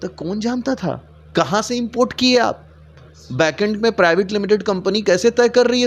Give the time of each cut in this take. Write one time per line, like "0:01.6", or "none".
0:01.1